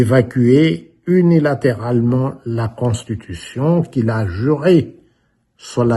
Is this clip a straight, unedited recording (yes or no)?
yes